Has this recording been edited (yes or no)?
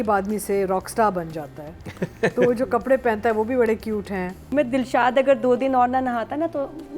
yes